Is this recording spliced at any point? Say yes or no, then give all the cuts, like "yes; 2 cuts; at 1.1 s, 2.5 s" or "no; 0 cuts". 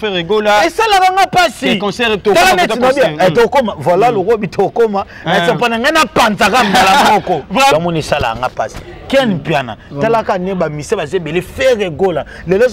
yes; 1 cut; at 7.7 s